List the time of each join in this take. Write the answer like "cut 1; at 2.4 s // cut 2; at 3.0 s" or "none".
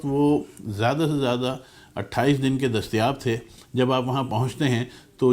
cut 1; at 3.6 s